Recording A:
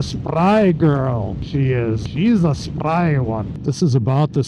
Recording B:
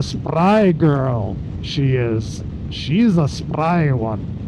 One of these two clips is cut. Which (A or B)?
A